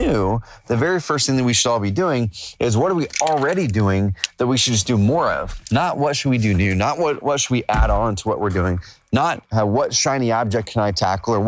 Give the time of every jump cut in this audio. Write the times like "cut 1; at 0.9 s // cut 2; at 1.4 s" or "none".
cut 1; at 5.5 s // cut 2; at 9.4 s